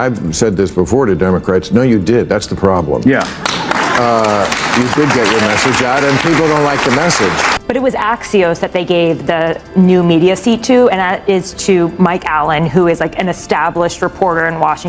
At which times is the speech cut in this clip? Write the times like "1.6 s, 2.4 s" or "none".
7.4 s